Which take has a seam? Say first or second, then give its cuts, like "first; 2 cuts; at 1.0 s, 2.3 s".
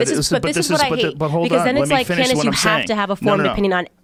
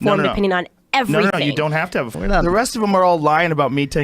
second; 1 cut; at 2.1 s